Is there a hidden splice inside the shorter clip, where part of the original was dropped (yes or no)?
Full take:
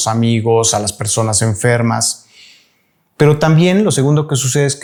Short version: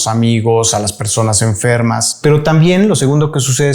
yes